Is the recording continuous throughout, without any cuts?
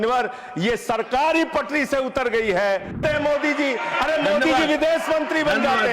no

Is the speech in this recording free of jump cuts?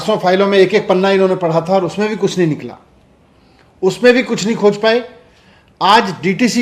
yes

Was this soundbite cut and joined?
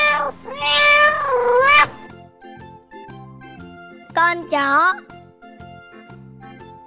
yes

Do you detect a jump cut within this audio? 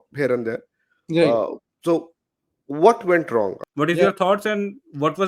yes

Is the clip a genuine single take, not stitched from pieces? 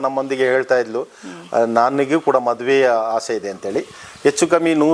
yes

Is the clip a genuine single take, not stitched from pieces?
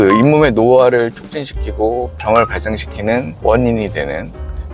no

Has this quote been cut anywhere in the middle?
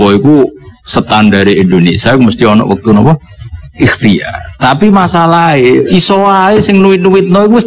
no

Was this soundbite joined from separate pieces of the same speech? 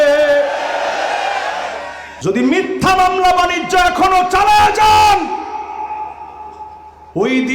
yes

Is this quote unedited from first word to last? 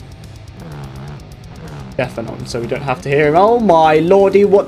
no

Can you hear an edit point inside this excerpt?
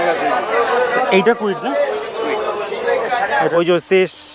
yes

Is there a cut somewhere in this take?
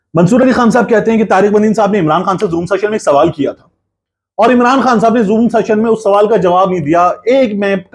no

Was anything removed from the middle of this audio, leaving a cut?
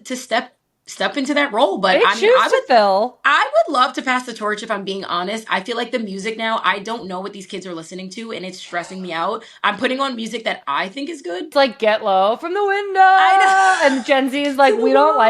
yes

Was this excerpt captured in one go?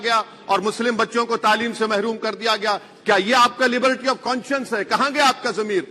yes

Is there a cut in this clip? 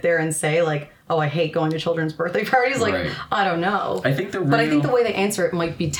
no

